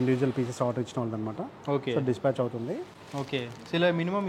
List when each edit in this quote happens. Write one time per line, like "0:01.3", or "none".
none